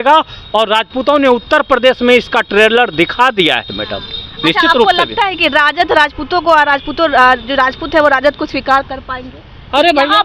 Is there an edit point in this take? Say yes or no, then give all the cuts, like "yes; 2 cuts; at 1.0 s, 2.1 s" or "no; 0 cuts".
no; 0 cuts